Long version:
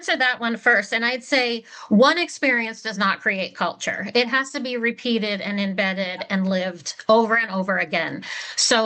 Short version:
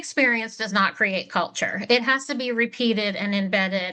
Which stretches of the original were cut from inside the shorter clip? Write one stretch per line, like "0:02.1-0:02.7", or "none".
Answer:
none